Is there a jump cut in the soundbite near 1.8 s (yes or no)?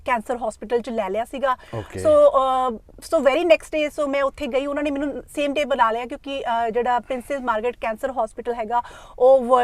no